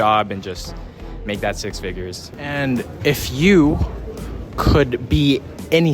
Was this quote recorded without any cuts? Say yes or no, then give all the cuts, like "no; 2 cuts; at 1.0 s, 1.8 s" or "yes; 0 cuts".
no; 1 cut; at 2.2 s